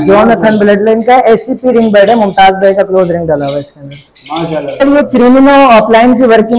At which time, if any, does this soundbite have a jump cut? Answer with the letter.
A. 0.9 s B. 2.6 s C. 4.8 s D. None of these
C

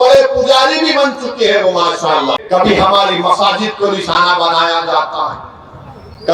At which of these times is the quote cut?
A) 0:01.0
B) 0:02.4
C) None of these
B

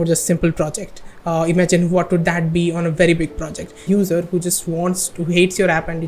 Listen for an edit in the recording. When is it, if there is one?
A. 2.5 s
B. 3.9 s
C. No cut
B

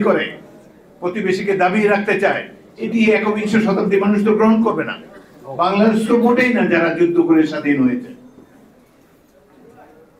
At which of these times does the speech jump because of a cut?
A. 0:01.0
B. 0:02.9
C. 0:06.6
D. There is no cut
D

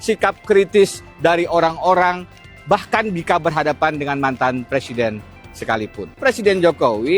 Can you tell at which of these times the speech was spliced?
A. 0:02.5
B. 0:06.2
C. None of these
B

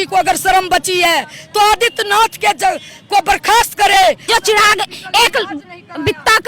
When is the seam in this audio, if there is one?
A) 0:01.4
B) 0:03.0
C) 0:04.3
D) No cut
C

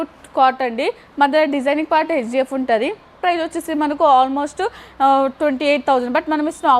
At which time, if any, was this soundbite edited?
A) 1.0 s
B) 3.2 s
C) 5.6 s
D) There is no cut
B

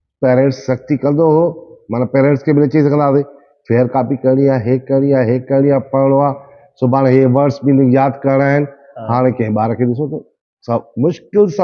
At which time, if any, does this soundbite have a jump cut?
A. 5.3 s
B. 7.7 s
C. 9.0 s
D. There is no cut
D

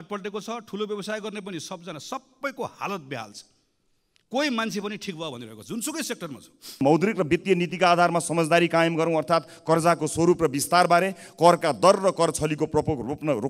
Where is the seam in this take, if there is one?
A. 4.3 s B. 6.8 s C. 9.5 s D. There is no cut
B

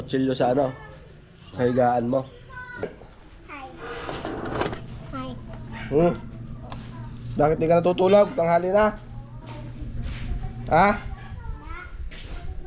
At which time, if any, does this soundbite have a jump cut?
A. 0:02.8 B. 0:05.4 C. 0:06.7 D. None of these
A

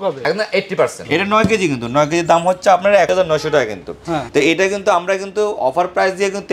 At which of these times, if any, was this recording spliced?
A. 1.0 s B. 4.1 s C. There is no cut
A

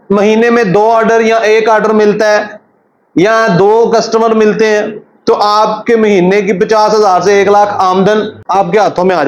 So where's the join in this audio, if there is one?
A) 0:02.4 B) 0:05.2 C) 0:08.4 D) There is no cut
C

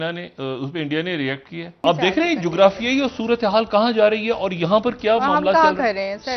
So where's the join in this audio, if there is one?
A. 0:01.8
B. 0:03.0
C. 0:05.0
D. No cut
A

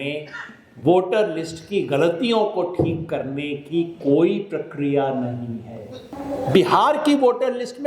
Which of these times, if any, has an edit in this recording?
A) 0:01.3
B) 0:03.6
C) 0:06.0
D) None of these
C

